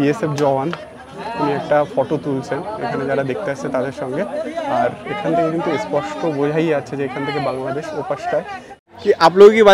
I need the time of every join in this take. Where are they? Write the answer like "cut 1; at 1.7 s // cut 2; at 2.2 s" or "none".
cut 1; at 8.7 s